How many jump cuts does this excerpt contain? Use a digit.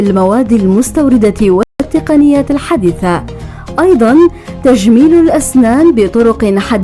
1